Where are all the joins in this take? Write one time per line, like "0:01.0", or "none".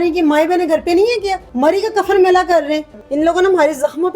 0:01.4
0:03.0